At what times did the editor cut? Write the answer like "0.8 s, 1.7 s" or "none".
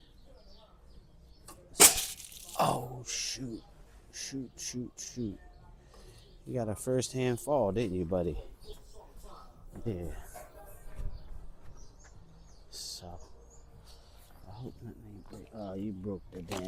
none